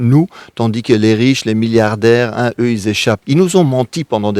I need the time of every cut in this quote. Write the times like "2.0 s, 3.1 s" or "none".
3.2 s